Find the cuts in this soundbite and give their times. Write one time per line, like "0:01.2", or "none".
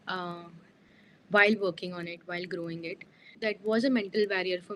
0:03.4